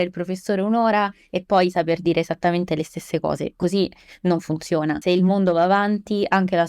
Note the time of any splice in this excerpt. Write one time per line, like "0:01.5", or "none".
0:05.0